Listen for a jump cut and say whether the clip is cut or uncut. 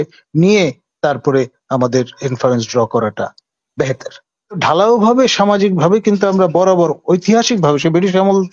cut